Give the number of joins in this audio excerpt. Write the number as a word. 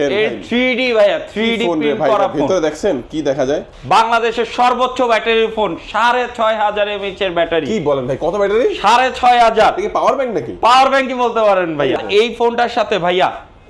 two